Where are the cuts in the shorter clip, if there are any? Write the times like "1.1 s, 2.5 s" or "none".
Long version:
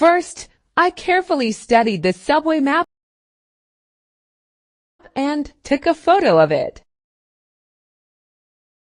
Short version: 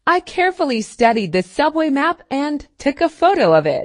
2.2 s